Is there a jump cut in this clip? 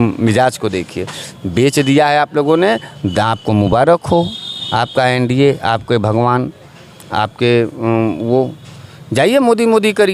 no; 0 cuts

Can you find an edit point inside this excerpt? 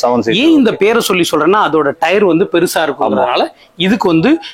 no; 0 cuts

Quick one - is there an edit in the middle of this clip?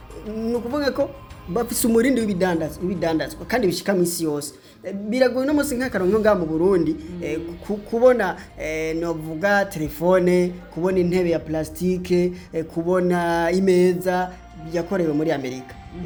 no; 0 cuts

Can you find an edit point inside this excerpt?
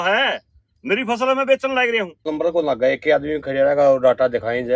yes; 1 cut; at 2.3 s

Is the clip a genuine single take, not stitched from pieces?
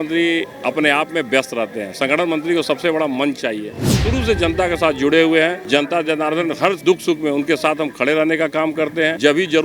no; 2 cuts; at 4.0 s, 5.6 s

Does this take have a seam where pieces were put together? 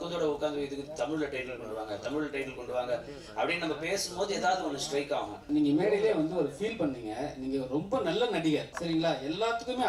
yes; 2 cuts; at 5.4 s, 8.7 s

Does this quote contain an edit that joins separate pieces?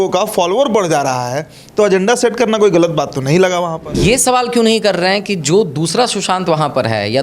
yes; 1 cut; at 4.0 s

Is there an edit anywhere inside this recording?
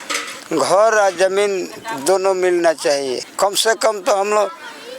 yes; 1 cut; at 3.3 s

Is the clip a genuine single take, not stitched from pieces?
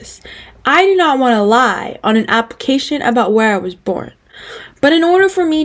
yes; 0 cuts

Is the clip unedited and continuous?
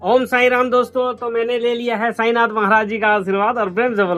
yes; 0 cuts

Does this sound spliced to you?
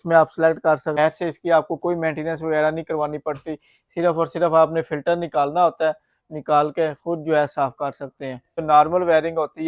yes; 2 cuts; at 1.0 s, 8.6 s

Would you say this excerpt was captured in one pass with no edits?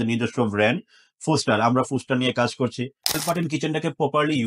no; 1 cut; at 3.2 s

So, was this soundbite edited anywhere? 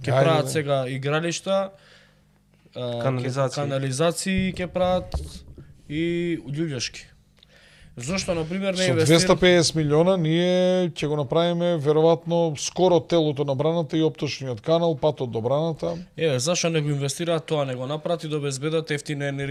no; 0 cuts

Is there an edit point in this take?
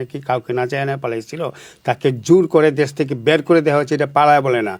no; 0 cuts

